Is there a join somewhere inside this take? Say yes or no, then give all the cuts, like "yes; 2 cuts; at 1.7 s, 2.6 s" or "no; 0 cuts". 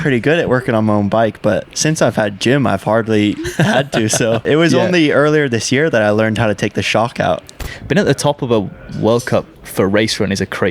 yes; 2 cuts; at 4.4 s, 7.6 s